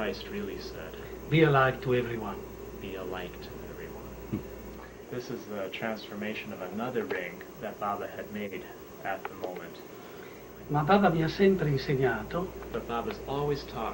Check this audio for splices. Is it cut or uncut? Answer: cut